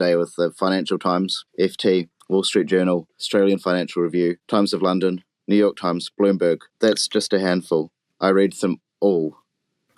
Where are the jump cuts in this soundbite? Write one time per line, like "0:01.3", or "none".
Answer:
0:01.4
0:03.2
0:04.4
0:06.7